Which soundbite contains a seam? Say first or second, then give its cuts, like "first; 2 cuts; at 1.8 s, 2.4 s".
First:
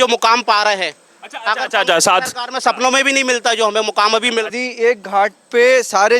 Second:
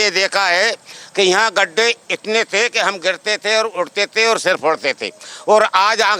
first; 1 cut; at 4.5 s